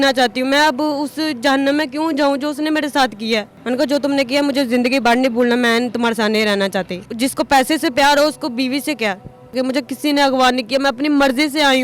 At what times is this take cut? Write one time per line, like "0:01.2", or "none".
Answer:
0:03.5
0:07.1
0:09.5